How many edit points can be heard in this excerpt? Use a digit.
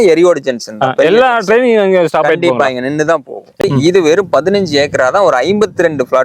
1